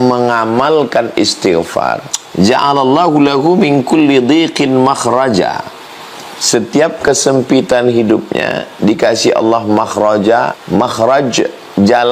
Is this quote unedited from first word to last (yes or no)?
no